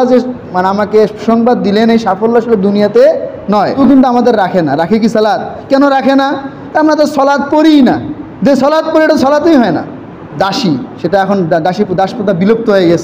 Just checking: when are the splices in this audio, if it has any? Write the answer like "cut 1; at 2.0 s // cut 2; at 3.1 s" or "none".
cut 1; at 3.8 s // cut 2; at 10.3 s